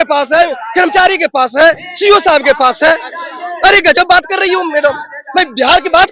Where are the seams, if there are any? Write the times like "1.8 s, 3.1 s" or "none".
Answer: none